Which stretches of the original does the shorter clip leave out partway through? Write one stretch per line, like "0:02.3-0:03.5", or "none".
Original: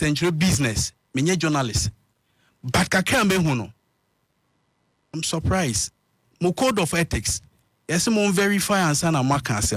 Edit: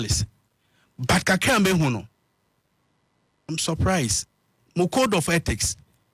none